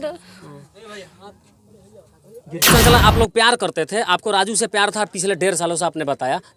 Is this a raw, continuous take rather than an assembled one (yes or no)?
no